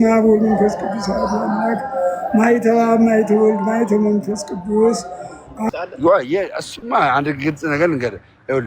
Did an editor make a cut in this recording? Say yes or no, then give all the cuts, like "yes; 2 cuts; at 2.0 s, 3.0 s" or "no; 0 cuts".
yes; 1 cut; at 5.7 s